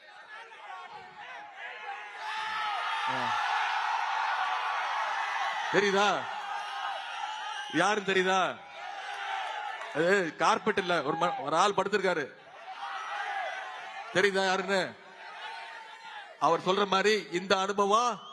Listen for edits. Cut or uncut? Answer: uncut